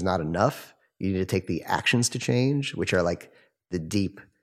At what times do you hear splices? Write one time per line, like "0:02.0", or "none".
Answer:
none